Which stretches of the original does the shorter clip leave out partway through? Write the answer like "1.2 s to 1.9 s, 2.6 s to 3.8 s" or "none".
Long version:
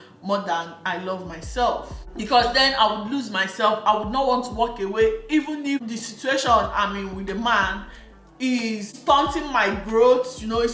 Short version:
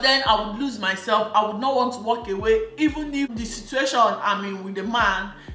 none